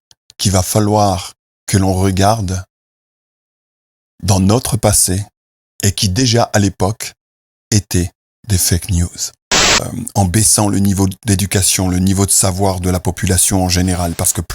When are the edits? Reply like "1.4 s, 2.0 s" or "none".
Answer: 9.8 s